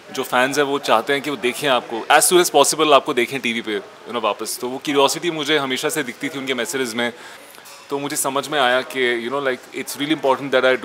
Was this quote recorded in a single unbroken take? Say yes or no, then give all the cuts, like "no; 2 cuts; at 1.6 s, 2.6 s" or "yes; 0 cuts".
no; 1 cut; at 7.4 s